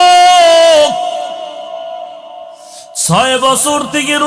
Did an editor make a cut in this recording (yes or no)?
no